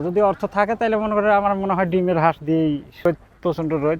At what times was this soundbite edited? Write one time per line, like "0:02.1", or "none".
0:03.1